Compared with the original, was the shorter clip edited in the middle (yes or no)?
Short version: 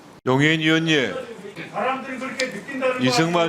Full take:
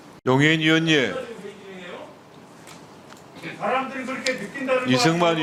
yes